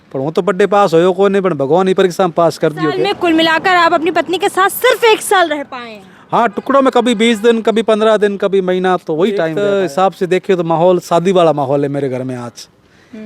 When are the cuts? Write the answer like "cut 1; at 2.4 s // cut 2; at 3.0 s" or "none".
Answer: cut 1; at 3.1 s // cut 2; at 9.5 s